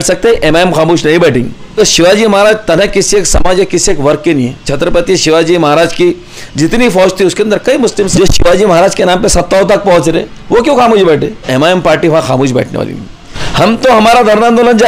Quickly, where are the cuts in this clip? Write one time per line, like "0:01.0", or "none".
0:01.8
0:04.7
0:08.1
0:11.4
0:13.4